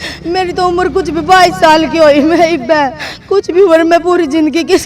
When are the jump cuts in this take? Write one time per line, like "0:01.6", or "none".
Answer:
none